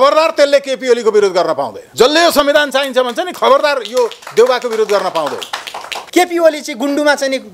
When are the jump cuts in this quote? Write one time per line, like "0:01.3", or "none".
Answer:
0:06.0

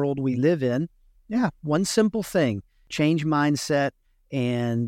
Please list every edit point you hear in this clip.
none

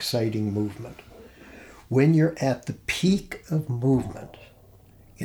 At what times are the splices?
none

